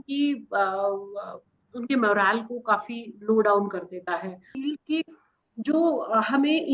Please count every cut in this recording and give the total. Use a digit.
1